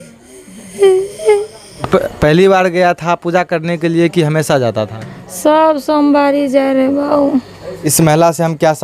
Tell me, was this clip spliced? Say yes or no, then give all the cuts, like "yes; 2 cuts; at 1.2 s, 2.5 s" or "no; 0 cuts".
yes; 2 cuts; at 1.9 s, 7.8 s